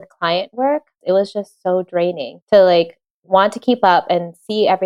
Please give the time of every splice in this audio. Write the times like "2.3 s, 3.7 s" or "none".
0.9 s, 2.3 s

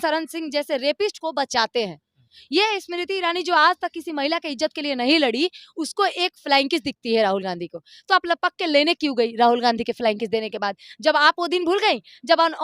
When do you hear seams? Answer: none

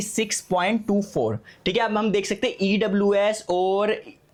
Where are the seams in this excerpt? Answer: none

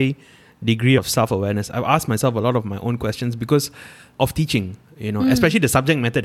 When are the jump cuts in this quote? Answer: 1.0 s, 4.1 s

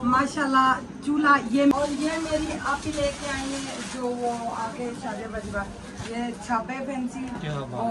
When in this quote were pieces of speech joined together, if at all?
1.7 s

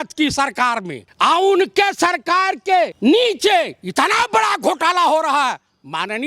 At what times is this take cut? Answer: 1.0 s, 2.9 s

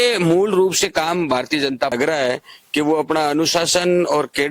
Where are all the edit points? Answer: 1.9 s

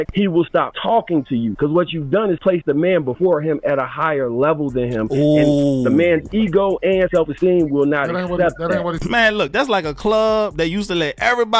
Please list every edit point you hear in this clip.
9.0 s

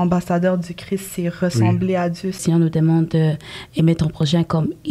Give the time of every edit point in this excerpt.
2.4 s

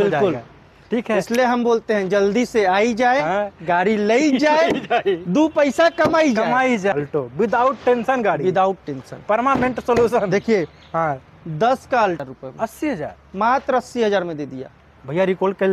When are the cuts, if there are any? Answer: 6.9 s, 12.3 s

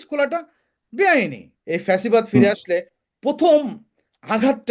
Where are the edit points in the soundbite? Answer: 1.5 s

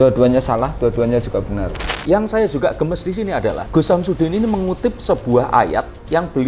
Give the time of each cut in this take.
1.9 s, 3.6 s

